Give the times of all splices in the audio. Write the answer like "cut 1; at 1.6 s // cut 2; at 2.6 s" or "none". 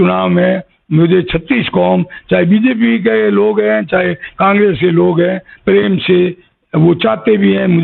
none